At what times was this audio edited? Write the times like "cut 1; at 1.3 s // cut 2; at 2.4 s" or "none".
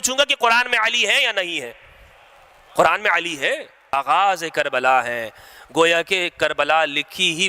cut 1; at 3.8 s